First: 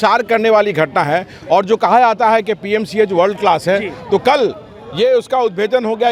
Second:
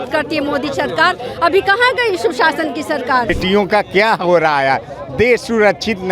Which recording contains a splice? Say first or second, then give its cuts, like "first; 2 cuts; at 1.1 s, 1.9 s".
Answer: second; 1 cut; at 3.3 s